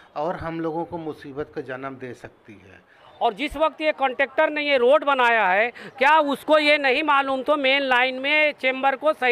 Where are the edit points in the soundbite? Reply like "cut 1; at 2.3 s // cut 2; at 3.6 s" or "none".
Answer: cut 1; at 3.0 s